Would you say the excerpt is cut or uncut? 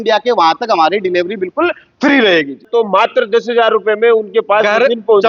cut